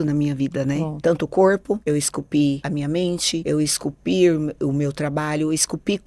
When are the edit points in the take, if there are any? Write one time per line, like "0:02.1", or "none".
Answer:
0:00.9
0:01.8
0:02.9